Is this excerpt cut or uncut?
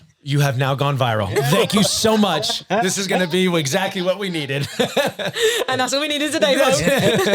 uncut